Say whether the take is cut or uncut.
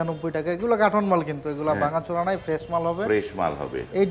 uncut